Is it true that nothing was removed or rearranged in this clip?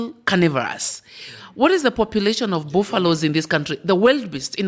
yes; 0 cuts

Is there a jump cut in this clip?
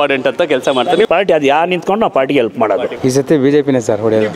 yes; 2 cuts; at 1.1 s, 2.9 s

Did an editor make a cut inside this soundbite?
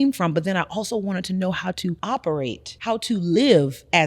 yes; 2 cuts; at 2.0 s, 2.7 s

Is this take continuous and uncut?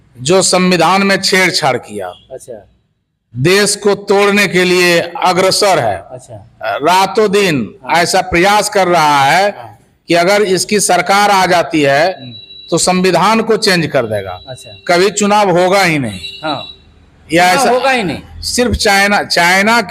yes; 0 cuts

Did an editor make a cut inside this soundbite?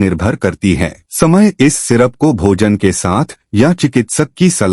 yes; 1 cut; at 1.0 s

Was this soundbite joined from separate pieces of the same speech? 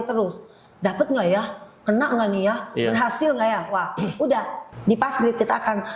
yes; 1 cut; at 4.6 s

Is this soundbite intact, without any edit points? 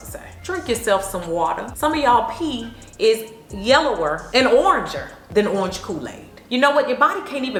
yes; 0 cuts

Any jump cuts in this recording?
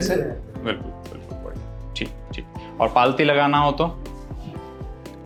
no; 0 cuts

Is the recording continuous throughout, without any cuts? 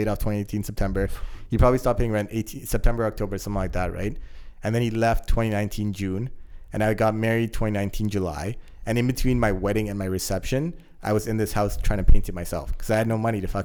yes; 0 cuts

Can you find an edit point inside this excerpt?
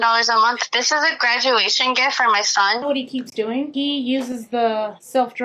yes; 1 cut; at 2.8 s

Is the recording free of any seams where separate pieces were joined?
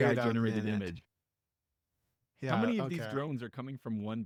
yes; 0 cuts

